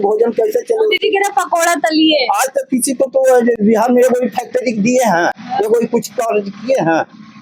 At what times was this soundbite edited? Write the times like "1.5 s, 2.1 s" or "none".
none